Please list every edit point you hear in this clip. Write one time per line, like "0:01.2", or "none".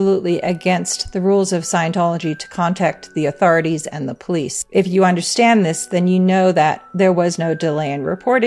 0:04.6